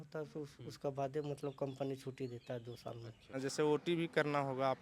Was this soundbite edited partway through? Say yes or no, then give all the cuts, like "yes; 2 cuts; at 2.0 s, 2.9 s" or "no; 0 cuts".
yes; 1 cut; at 3.2 s